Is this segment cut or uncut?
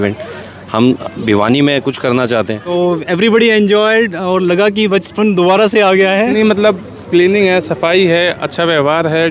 cut